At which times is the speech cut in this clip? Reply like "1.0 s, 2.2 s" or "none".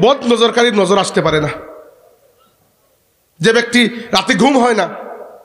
none

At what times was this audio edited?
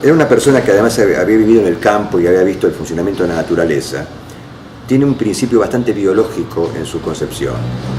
none

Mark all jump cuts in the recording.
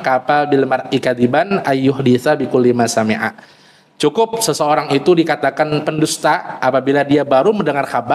none

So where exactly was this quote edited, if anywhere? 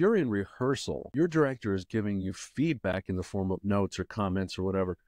1.0 s

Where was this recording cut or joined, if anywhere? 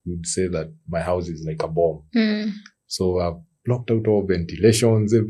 none

